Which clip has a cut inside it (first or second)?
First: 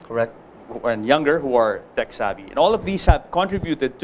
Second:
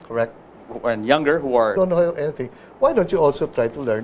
first